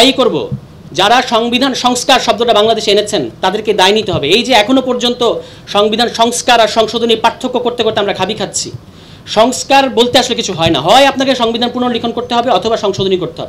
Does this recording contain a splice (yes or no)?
no